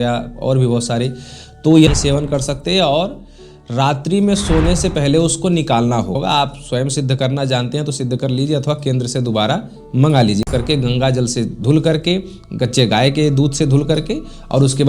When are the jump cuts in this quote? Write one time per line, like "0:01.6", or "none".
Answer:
0:01.9
0:06.2
0:10.4

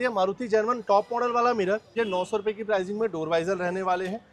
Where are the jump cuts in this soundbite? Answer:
0:01.9

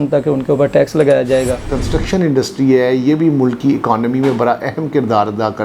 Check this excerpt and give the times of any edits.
0:01.6

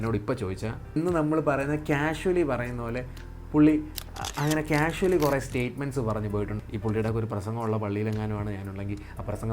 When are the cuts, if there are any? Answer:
0:00.9
0:06.5

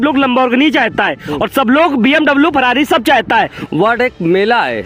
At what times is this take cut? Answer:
0:03.6

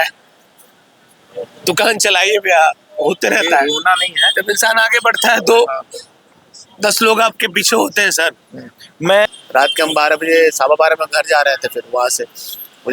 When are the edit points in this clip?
0:09.3

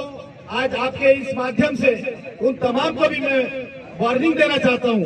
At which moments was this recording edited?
none

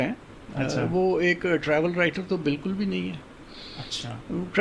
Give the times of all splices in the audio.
none

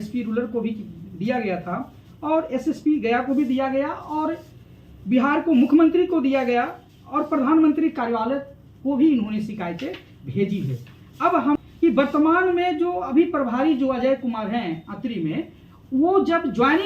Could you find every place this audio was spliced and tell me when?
0:11.6

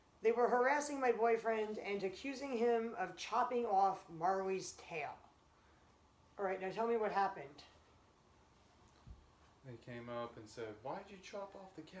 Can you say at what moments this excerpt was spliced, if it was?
none

